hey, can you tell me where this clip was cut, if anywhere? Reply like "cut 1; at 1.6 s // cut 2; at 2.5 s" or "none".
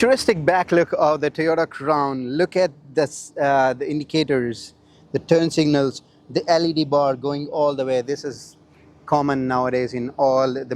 none